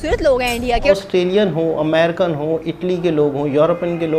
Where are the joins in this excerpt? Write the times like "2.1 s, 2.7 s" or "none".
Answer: 1.0 s